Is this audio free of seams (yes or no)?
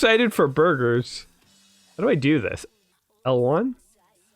no